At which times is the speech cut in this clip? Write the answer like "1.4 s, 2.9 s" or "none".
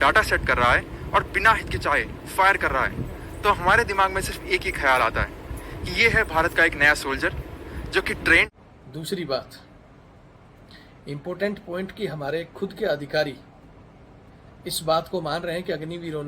8.5 s